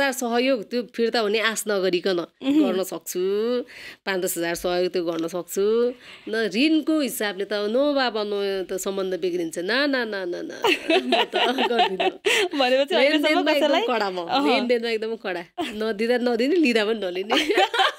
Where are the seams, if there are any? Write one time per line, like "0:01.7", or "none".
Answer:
none